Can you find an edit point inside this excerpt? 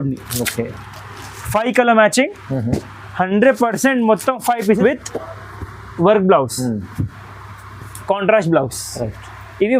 yes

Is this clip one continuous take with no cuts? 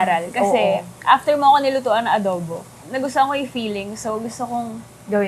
no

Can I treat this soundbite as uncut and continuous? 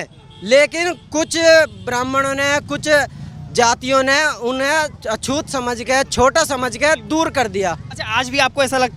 yes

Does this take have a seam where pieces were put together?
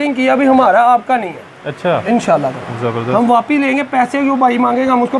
no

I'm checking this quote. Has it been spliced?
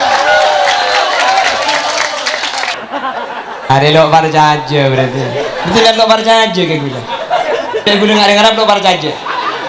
yes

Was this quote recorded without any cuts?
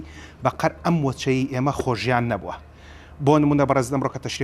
yes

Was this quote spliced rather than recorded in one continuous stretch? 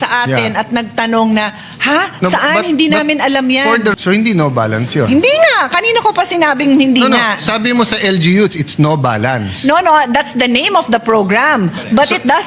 yes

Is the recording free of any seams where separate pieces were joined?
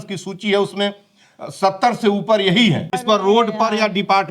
no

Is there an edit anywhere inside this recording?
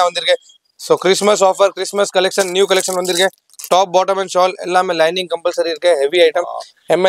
no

